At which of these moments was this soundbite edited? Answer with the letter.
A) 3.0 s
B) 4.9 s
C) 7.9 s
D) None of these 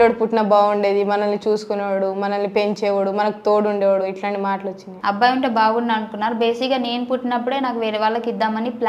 B